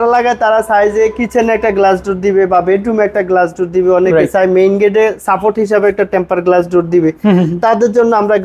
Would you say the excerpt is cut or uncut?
uncut